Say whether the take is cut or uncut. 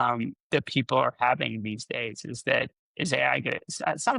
cut